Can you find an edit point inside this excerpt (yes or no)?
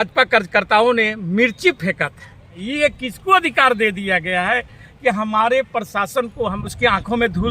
yes